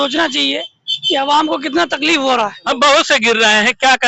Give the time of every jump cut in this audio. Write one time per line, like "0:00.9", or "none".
0:02.7